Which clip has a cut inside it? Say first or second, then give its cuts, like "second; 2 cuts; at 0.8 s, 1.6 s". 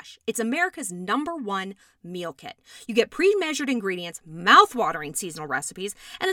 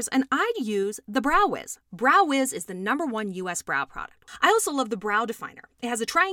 second; 1 cut; at 4.2 s